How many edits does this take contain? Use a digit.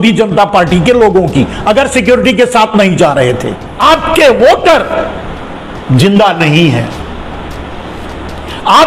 1